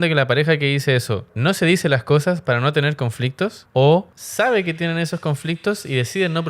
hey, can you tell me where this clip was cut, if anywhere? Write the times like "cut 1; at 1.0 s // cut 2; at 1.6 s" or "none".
cut 1; at 1.3 s // cut 2; at 3.6 s // cut 3; at 4.2 s